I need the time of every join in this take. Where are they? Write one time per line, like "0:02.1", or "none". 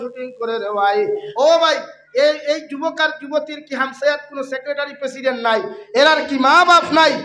0:01.3

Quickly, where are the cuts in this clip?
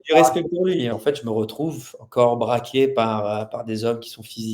0:01.0

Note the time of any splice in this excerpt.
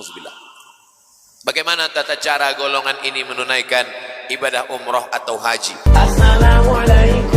0:05.7

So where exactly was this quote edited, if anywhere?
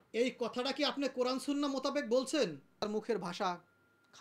0:02.9

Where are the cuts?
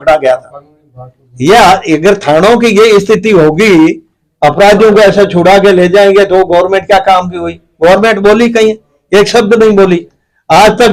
none

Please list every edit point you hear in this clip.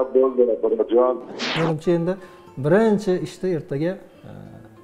0:01.4

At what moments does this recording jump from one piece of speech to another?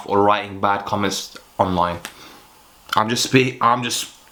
none

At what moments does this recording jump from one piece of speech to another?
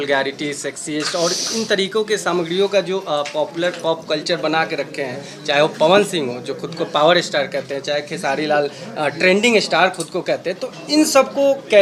none

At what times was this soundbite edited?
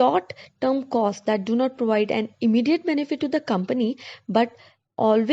0:01.8

